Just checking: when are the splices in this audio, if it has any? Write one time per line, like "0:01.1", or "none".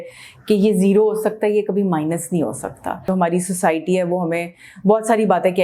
0:03.0